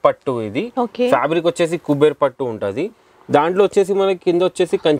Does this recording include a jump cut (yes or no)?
no